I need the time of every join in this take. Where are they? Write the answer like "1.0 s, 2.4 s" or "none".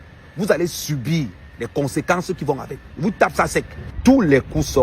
3.8 s